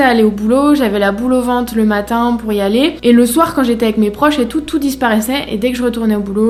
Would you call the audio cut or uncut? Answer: uncut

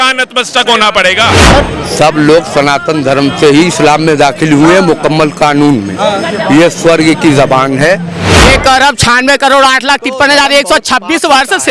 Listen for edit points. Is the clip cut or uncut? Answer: cut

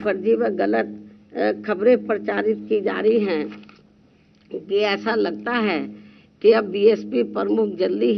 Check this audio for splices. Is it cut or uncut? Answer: uncut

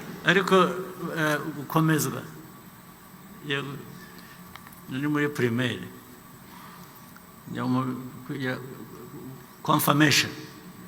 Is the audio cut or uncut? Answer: uncut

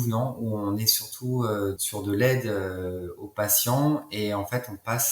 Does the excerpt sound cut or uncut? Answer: cut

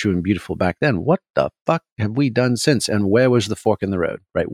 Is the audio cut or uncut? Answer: uncut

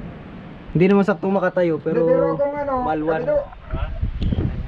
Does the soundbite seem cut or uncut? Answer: uncut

